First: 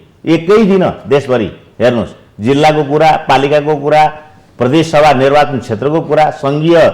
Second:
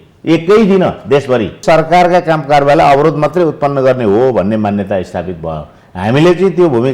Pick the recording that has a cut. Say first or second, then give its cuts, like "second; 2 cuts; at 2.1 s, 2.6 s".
second; 1 cut; at 1.6 s